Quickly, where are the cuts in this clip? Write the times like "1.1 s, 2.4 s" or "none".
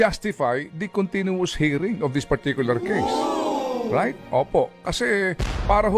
none